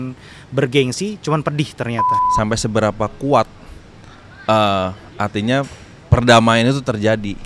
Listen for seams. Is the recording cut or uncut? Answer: cut